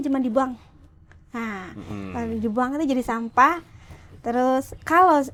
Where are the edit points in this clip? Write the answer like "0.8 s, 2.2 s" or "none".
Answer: none